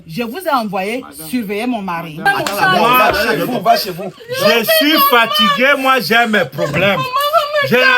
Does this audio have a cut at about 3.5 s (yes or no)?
no